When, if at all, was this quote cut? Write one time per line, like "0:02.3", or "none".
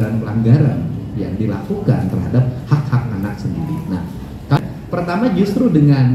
0:04.6